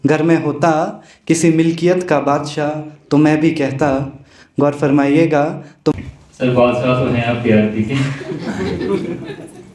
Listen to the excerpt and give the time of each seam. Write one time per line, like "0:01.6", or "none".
0:05.9